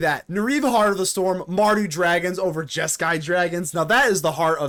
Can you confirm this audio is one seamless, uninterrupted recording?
yes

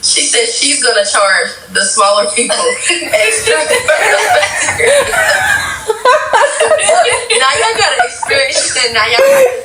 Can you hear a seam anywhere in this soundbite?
no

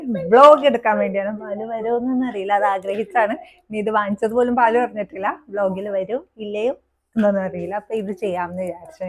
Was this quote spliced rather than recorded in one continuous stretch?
no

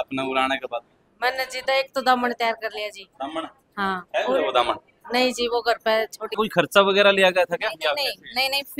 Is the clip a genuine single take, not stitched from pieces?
no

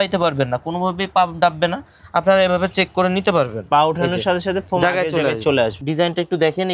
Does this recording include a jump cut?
yes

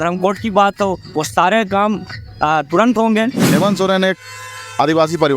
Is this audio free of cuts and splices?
no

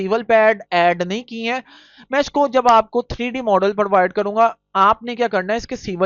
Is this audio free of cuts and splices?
yes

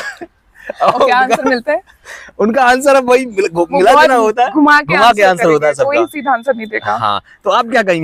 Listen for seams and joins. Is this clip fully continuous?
yes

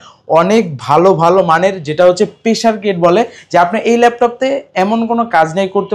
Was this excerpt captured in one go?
yes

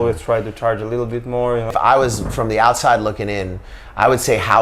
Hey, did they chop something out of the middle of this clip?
yes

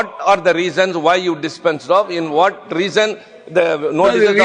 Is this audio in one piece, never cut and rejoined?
yes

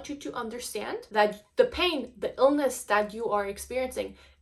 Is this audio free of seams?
no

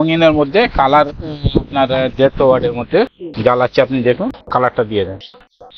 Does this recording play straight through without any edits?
yes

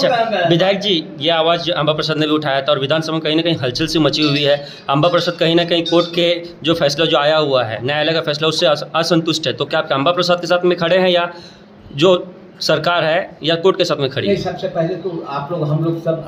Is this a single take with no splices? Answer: yes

